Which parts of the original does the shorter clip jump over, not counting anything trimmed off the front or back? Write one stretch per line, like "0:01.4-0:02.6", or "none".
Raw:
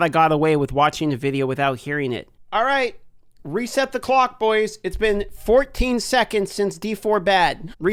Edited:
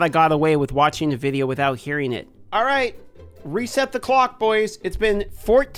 none